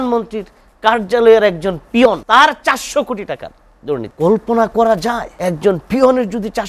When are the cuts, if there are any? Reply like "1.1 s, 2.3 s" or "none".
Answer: 2.2 s, 4.1 s, 5.3 s